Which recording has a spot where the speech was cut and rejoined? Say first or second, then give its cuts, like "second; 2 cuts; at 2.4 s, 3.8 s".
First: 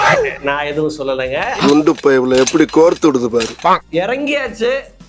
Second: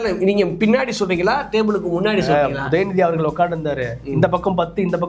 first; 1 cut; at 3.8 s